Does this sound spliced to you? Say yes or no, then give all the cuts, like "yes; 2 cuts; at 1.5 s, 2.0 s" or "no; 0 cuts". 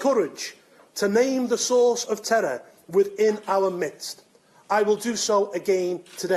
yes; 1 cut; at 1.7 s